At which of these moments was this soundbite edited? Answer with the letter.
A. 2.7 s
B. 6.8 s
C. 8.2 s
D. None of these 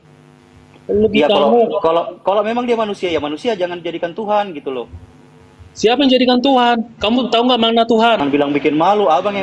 C